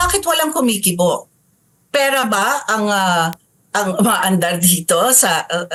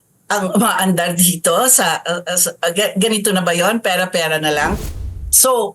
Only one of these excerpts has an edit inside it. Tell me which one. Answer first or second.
second